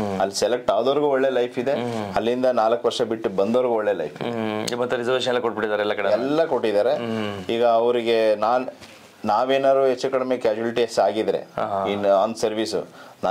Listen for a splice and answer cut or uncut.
uncut